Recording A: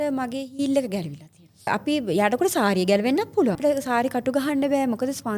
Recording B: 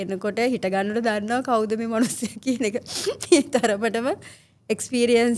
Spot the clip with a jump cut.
A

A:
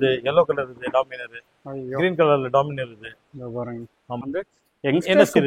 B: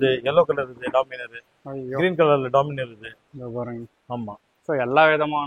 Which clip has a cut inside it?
A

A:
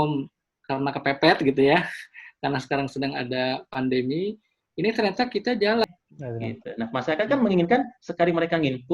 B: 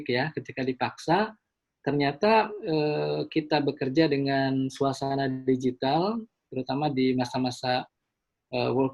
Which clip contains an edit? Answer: A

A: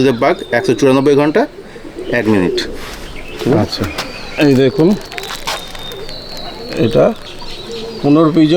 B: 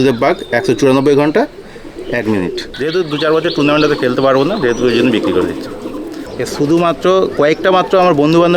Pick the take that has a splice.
B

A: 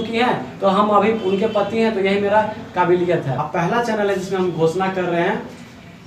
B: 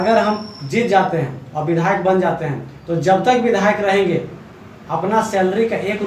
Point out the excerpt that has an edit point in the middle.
A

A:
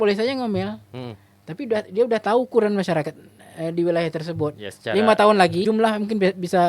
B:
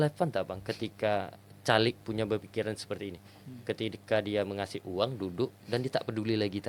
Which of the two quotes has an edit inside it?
A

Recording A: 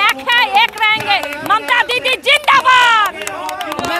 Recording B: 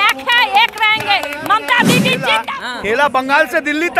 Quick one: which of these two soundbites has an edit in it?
B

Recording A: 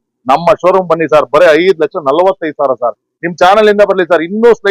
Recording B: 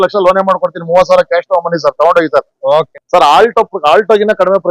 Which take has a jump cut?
B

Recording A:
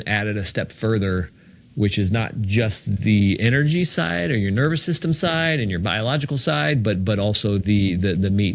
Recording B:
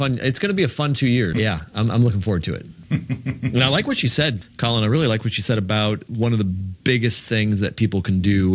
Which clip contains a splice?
B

